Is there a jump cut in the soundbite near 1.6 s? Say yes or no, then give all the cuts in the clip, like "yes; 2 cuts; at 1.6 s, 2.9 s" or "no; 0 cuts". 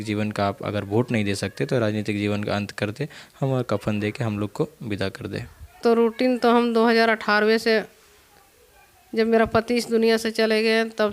no; 1 cut; at 5.7 s